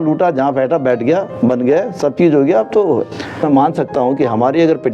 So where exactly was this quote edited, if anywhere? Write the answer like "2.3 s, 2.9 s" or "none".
3.4 s